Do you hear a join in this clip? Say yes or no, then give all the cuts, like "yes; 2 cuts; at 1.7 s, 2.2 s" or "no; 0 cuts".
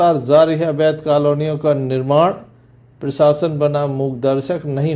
no; 0 cuts